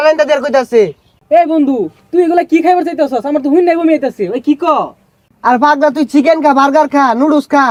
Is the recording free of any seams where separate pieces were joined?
yes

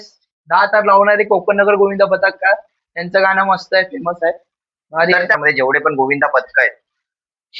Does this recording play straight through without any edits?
no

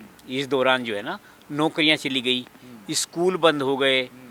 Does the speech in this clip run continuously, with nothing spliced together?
yes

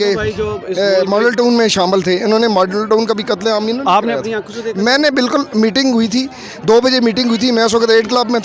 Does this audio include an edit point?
no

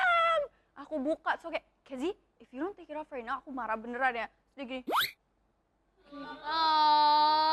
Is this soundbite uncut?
yes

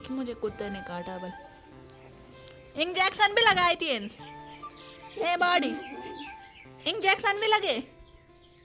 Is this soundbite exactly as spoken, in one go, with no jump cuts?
yes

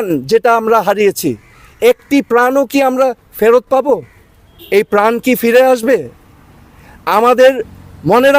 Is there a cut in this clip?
no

